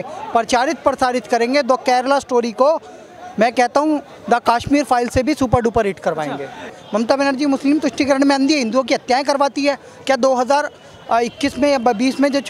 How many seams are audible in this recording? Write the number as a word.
one